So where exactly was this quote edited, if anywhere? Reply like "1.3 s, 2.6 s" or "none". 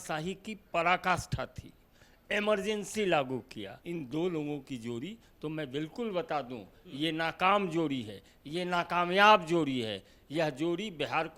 3.7 s

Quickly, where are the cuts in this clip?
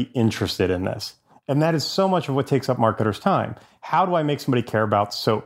none

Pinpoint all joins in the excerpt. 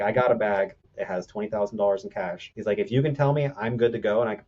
0.9 s, 2.4 s

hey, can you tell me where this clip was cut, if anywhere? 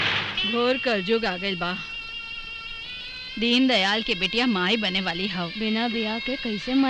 none

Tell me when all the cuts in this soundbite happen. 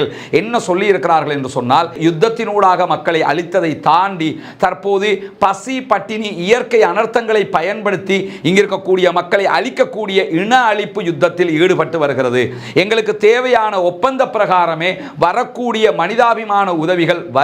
2.0 s

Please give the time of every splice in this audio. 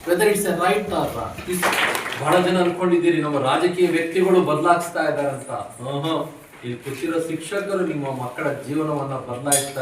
1.6 s

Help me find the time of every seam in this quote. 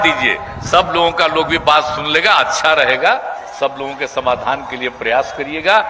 none

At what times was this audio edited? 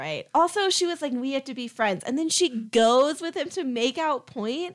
none

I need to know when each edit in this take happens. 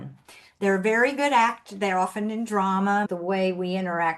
3.1 s

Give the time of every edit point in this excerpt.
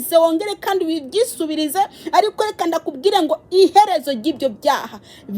none

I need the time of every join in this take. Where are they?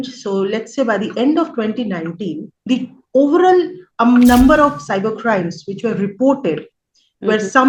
2.5 s, 3.8 s

